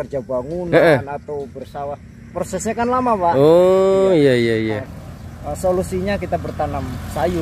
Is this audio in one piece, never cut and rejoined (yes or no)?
no